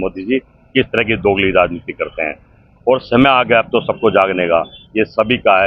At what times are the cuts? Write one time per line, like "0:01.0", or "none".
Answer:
none